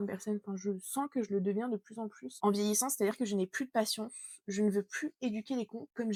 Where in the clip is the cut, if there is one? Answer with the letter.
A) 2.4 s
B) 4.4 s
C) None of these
C